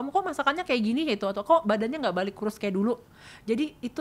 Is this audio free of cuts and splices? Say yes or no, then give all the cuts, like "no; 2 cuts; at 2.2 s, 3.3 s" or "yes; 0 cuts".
yes; 0 cuts